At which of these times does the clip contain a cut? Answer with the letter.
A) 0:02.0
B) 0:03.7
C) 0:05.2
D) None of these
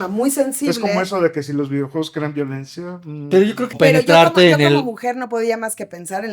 B